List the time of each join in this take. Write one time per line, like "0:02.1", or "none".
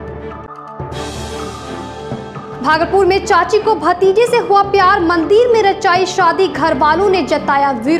0:02.1